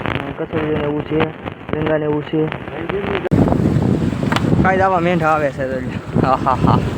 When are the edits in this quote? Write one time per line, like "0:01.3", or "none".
0:03.3